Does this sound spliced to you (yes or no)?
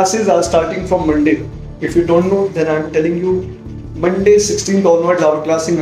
no